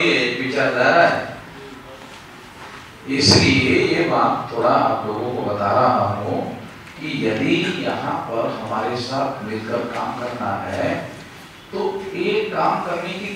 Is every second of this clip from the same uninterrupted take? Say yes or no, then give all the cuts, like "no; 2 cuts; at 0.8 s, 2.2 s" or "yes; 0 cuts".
yes; 0 cuts